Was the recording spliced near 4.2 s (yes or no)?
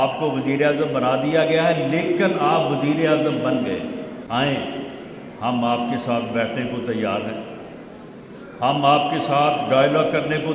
yes